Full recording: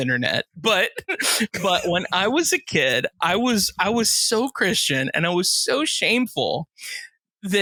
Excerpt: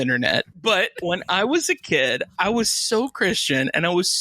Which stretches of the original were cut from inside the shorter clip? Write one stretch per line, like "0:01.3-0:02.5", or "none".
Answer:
0:01.0-0:01.8
0:03.1-0:03.7